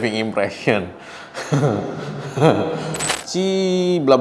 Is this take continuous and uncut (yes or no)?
no